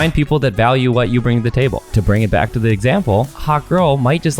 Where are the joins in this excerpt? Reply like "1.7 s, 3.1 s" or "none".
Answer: 1.9 s, 3.4 s